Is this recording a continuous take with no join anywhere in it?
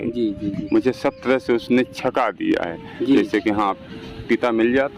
yes; 0 cuts

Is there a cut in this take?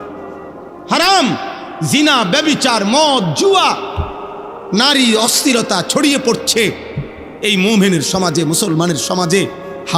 no; 0 cuts

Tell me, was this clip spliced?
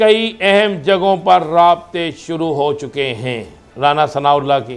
yes; 1 cut; at 3.6 s

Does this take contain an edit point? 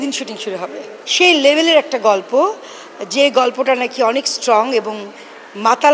yes; 1 cut; at 0.9 s

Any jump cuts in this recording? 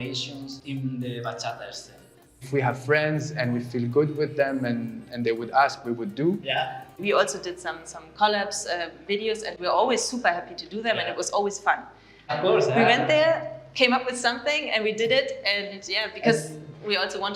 yes; 3 cuts; at 2.5 s, 6.9 s, 12.3 s

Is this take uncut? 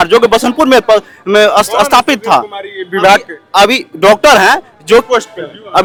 yes; 0 cuts

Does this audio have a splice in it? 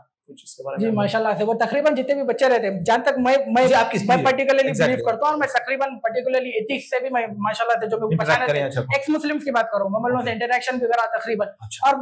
no; 0 cuts

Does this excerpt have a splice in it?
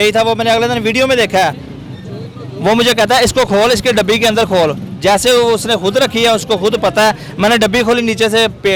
no; 0 cuts

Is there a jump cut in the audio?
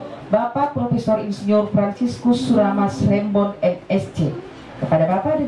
no; 0 cuts

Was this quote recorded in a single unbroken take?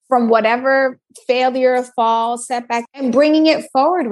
no; 1 cut; at 3.0 s

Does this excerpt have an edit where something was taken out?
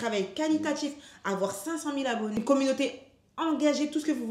yes; 1 cut; at 2.4 s

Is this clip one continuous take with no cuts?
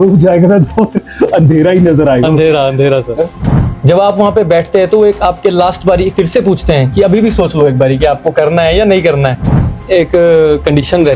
no; 2 cuts; at 3.4 s, 9.8 s

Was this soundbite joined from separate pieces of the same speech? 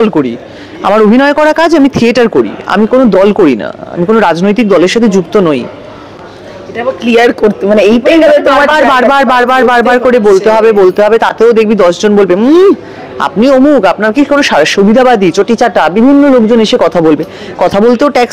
no; 0 cuts

